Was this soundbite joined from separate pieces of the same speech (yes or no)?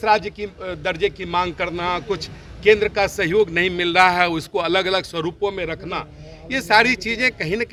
no